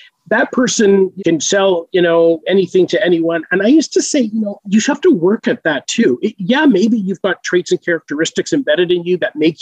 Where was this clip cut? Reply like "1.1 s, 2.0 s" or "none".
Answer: 1.1 s, 4.6 s